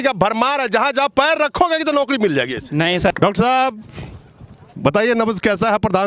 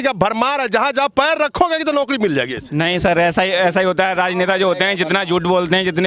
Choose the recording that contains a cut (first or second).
first